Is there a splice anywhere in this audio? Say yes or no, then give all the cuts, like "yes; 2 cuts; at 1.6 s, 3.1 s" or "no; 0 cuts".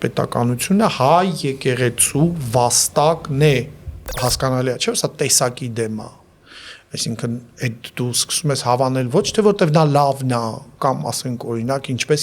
yes; 1 cut; at 4.2 s